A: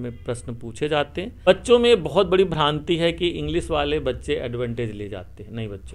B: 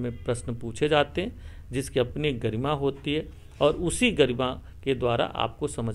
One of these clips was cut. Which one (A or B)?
A